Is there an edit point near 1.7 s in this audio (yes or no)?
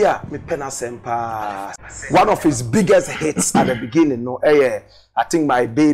yes